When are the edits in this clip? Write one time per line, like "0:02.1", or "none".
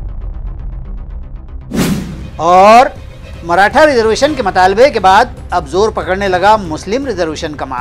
none